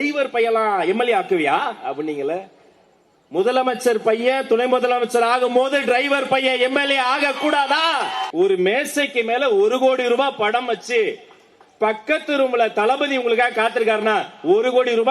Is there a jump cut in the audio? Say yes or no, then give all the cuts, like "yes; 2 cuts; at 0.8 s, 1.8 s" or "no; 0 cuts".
yes; 1 cut; at 8.2 s